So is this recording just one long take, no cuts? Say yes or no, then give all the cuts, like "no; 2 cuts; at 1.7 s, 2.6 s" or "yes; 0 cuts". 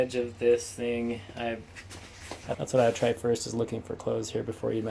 no; 1 cut; at 2.5 s